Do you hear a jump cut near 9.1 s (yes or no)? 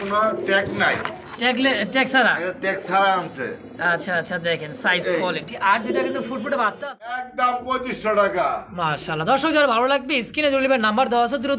no